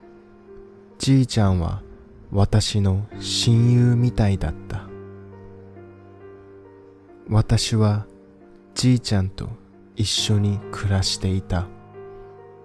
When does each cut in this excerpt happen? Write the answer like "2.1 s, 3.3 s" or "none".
0.9 s, 11.6 s